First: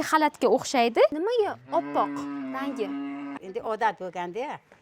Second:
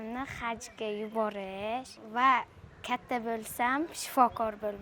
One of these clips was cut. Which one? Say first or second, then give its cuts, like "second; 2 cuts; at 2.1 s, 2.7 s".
first; 2 cuts; at 1.1 s, 3.3 s